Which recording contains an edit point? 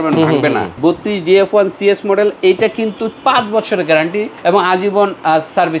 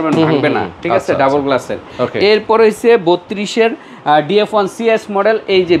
first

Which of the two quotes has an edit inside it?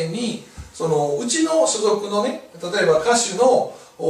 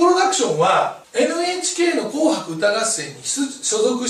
second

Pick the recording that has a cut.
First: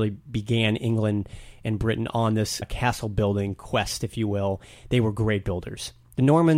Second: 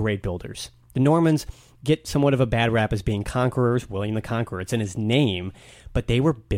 first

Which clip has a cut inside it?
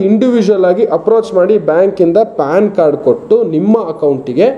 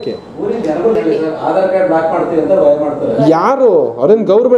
second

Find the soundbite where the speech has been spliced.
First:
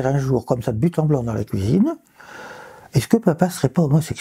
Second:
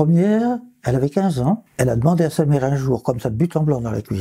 second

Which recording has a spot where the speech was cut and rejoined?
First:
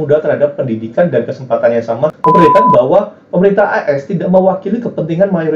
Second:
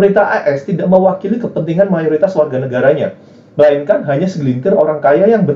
first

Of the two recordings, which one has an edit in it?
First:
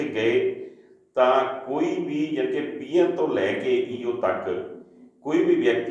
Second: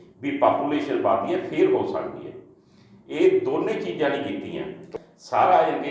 second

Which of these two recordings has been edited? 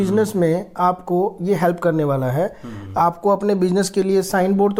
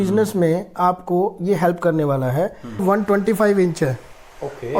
second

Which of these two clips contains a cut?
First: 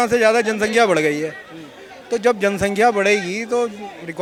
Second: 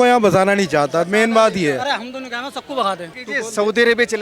second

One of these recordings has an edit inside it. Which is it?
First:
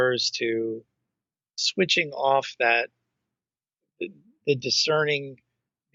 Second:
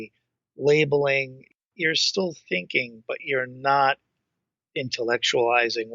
second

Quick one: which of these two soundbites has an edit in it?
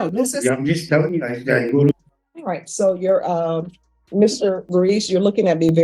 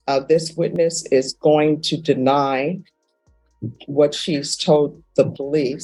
first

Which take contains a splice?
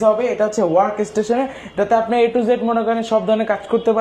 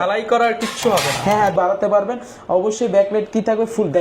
second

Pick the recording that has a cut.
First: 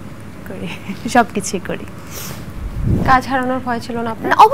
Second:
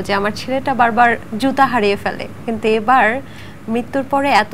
first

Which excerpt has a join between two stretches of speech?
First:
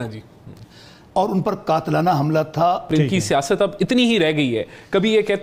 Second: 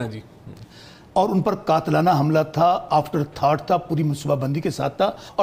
first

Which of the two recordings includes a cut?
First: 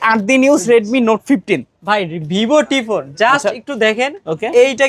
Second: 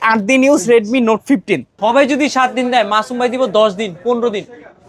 second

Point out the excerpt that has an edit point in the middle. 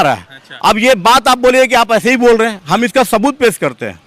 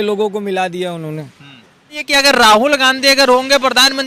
second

